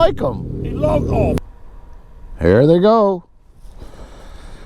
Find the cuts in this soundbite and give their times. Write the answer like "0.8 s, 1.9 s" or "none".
1.4 s